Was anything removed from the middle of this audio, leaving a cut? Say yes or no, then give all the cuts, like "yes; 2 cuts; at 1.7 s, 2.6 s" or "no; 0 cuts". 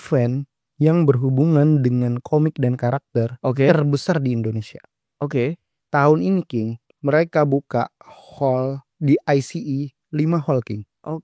no; 0 cuts